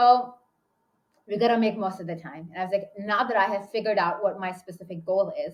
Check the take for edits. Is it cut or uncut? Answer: uncut